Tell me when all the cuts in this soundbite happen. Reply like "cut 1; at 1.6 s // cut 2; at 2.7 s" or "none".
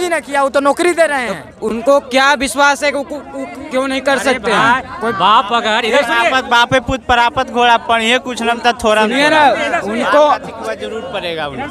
none